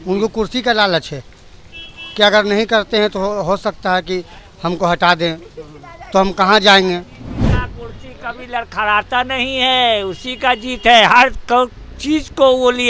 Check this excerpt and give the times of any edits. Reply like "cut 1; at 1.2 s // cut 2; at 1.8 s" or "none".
cut 1; at 7.3 s